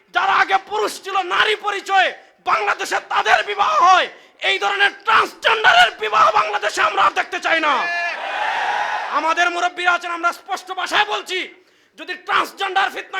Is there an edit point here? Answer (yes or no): no